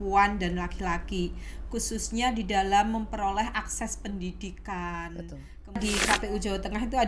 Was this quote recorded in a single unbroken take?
no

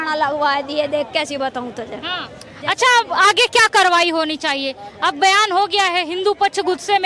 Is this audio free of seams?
yes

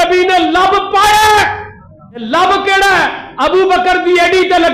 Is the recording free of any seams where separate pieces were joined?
no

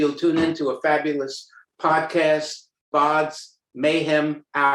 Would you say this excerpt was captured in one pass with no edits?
no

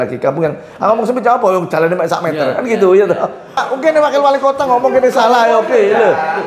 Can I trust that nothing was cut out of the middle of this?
no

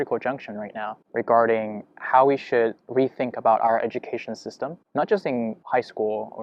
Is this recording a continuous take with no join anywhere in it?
yes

